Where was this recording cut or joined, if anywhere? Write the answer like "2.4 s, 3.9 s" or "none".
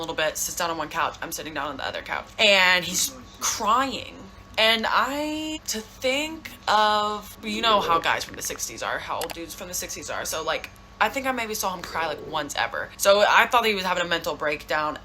2.3 s, 5.6 s, 7.3 s, 12.9 s